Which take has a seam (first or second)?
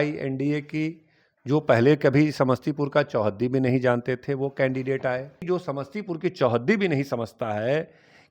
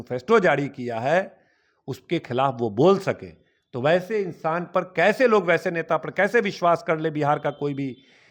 first